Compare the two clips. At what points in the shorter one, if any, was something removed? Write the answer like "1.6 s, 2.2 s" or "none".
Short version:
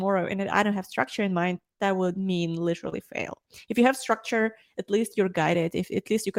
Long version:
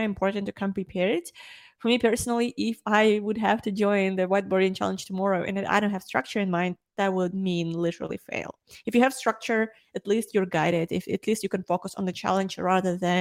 none